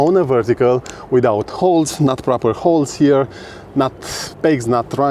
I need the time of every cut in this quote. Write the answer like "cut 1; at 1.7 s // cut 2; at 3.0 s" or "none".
none